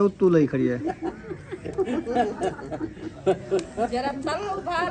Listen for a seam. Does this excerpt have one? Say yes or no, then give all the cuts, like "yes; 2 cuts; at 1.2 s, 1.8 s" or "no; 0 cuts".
no; 0 cuts